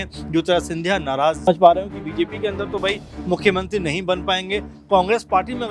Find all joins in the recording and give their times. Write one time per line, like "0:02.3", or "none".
0:01.4